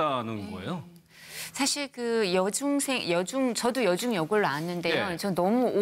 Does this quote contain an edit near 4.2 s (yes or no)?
no